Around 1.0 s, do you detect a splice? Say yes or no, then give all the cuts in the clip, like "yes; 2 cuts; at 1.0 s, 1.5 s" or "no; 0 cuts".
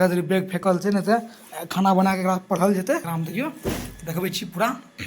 no; 1 cut; at 3.1 s